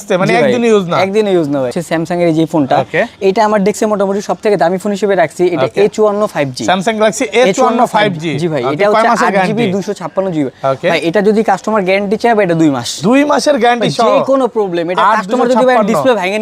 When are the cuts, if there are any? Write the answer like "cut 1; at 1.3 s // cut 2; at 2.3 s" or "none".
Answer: cut 1; at 1.7 s

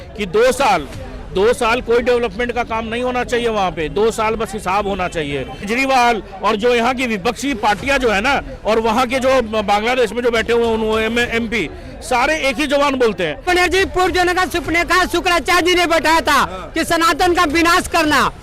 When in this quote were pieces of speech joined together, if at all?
cut 1; at 5.7 s // cut 2; at 13.5 s

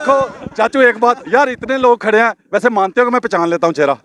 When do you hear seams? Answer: none

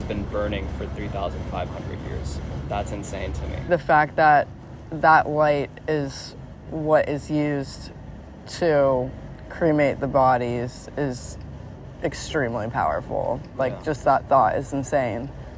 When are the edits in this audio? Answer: cut 1; at 2.4 s // cut 2; at 3.7 s

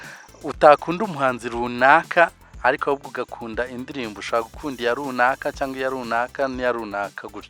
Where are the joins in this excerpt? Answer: none

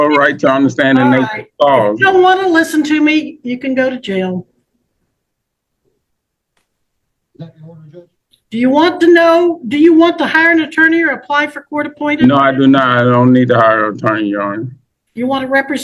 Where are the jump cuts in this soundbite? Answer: none

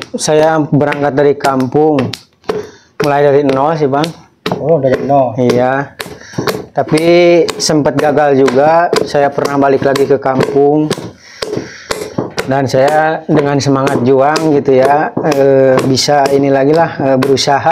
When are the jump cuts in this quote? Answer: none

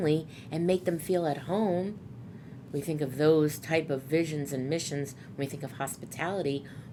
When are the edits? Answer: none

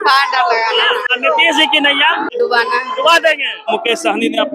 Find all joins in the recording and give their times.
cut 1; at 1.1 s // cut 2; at 2.3 s // cut 3; at 3.7 s

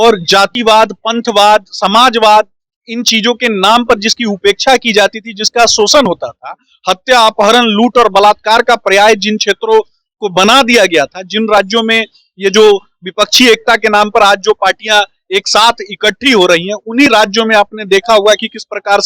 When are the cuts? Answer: none

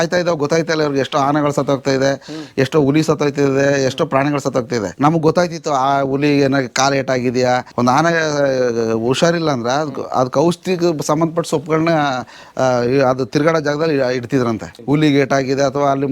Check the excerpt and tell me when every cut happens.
cut 1; at 4.9 s // cut 2; at 7.7 s // cut 3; at 14.7 s

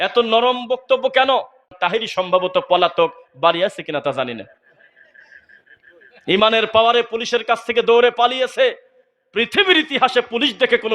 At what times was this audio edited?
cut 1; at 1.7 s

